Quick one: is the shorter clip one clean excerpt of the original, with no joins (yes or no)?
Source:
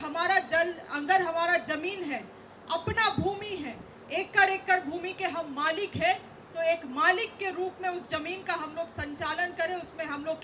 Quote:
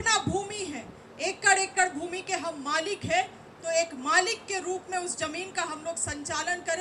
yes